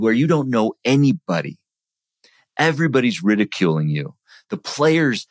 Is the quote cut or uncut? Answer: uncut